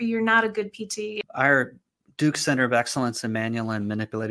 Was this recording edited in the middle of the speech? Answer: yes; 1 cut; at 1.2 s

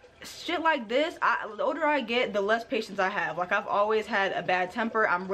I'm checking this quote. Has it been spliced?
no; 0 cuts

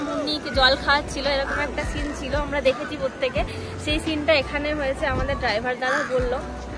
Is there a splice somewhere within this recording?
no; 0 cuts

